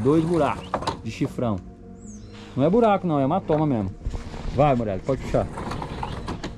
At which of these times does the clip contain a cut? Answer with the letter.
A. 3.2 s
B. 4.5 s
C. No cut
C